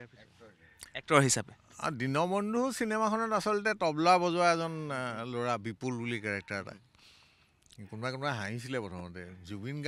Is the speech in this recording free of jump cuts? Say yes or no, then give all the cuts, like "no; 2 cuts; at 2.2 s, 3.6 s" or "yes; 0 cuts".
yes; 0 cuts